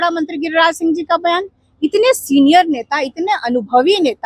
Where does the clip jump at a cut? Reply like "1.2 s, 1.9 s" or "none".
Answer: none